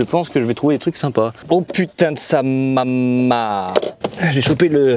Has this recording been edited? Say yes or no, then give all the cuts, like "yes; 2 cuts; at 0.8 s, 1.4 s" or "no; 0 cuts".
yes; 1 cut; at 4.0 s